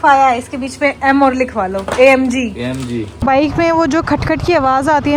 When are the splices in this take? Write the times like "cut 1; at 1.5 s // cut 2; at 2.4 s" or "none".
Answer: cut 1; at 3.1 s